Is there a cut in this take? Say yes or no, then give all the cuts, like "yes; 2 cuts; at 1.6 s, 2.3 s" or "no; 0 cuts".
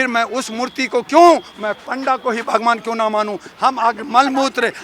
yes; 1 cut; at 3.5 s